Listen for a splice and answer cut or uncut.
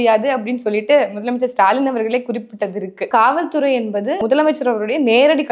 cut